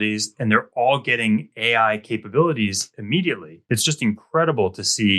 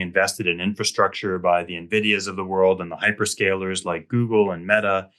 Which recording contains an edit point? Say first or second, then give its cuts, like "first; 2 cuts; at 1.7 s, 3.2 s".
first; 1 cut; at 3.5 s